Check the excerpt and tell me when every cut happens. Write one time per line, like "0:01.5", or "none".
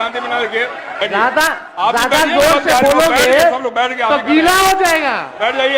0:01.0